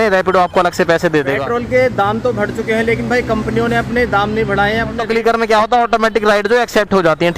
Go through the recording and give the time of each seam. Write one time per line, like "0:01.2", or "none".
0:01.3
0:05.0